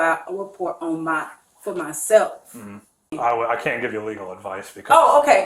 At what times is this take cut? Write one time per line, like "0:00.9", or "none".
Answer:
0:03.1